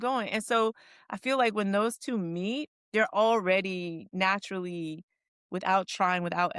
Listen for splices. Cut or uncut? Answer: uncut